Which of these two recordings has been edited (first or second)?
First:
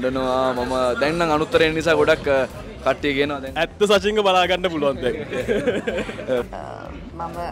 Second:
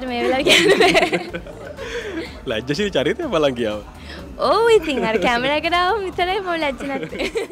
first